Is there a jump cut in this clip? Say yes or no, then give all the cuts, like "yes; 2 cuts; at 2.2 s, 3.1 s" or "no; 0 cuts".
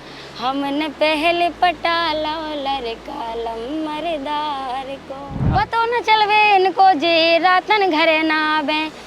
yes; 1 cut; at 5.4 s